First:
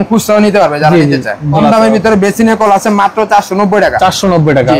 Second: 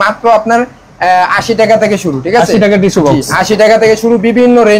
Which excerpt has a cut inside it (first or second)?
first